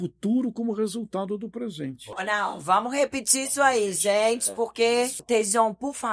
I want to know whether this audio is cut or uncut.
cut